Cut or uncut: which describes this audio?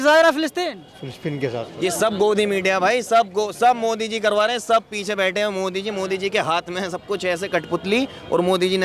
cut